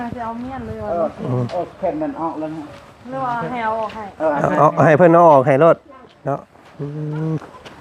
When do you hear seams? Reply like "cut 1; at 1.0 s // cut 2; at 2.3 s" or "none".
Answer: none